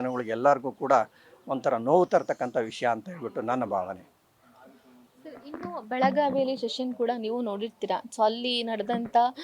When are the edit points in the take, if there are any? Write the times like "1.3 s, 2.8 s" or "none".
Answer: none